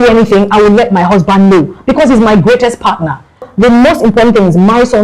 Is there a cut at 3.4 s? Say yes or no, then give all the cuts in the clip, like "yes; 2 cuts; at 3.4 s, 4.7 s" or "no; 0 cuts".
yes; 1 cut; at 3.4 s